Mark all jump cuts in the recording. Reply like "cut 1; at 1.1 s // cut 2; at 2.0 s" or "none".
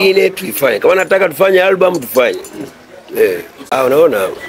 cut 1; at 3.5 s